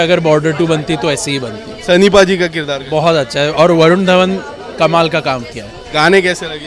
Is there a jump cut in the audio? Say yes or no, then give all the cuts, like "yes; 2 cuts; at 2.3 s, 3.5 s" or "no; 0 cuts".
no; 0 cuts